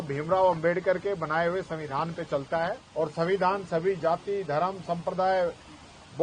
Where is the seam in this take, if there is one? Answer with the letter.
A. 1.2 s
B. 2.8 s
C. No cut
B